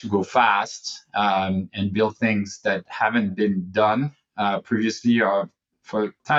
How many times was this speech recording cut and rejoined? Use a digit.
0